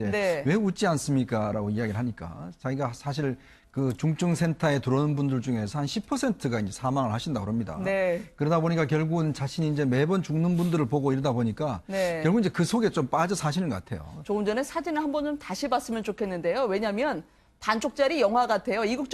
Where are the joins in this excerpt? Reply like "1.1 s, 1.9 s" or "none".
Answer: none